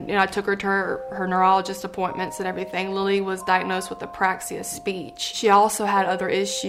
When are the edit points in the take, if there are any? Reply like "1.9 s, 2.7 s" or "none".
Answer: 5.3 s